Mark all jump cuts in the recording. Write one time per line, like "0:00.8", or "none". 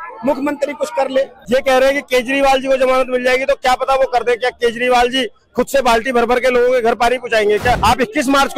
0:01.4
0:07.8